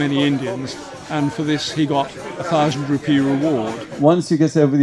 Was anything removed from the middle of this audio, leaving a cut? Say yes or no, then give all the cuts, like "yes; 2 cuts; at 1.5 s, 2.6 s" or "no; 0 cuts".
yes; 1 cut; at 3.8 s